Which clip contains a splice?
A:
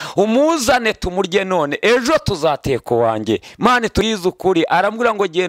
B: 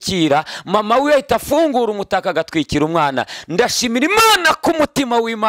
A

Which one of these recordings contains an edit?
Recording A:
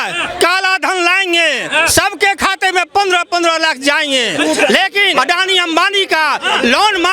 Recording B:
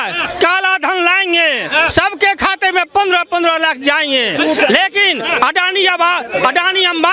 A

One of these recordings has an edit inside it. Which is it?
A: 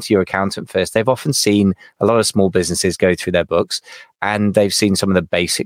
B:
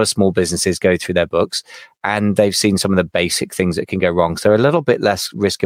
A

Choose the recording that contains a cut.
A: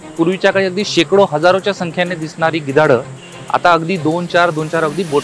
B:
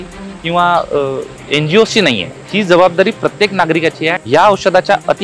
B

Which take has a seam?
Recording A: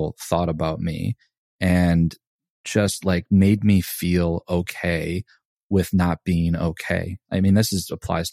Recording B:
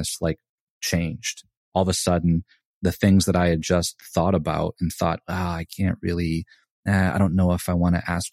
A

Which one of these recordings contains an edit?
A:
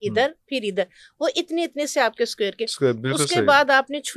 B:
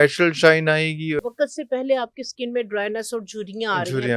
B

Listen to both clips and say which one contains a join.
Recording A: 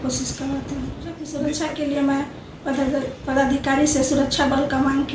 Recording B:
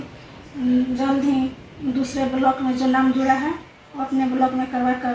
A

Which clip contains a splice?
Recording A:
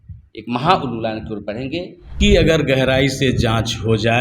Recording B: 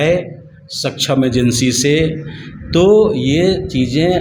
A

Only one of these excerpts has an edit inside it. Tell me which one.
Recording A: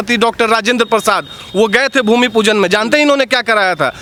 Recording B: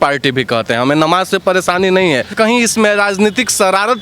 B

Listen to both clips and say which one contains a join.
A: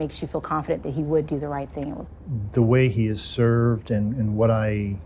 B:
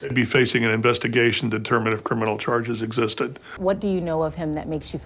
B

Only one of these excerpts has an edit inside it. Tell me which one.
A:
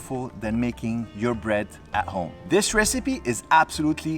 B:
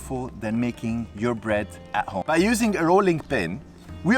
A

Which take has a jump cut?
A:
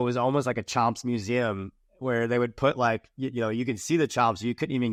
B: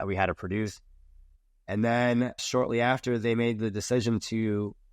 B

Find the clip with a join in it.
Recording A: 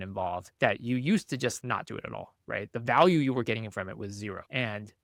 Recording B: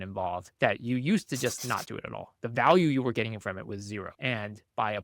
B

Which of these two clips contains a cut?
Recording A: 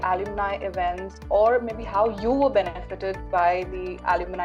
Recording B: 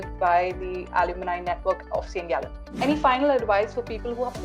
B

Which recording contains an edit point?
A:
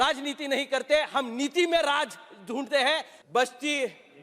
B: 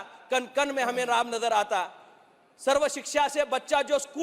A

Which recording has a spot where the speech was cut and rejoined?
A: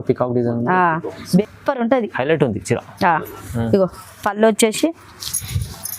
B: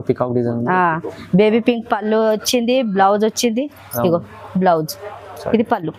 A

